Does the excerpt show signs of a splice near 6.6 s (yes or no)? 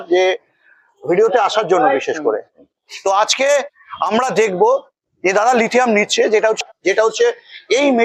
yes